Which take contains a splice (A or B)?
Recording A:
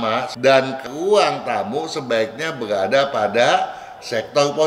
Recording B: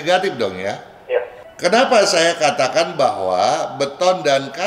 B